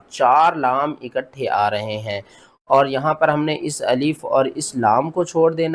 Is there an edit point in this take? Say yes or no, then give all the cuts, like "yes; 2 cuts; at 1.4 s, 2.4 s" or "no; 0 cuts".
no; 0 cuts